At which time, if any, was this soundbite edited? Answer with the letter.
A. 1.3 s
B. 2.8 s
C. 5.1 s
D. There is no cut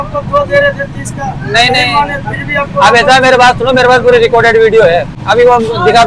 C